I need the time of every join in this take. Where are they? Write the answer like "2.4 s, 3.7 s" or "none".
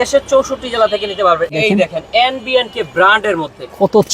1.5 s